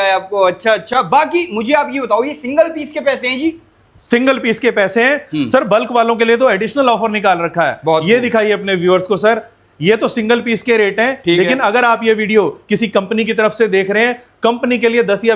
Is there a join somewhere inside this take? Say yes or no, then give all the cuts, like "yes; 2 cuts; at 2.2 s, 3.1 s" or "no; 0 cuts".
no; 0 cuts